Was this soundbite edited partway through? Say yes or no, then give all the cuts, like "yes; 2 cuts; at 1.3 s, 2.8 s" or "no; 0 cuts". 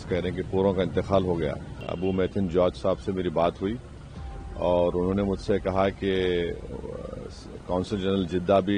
yes; 1 cut; at 1.8 s